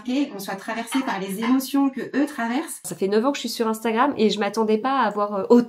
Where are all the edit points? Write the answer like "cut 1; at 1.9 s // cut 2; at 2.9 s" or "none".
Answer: cut 1; at 2.9 s